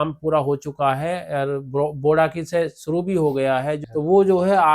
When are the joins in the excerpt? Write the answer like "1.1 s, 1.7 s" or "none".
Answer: 3.8 s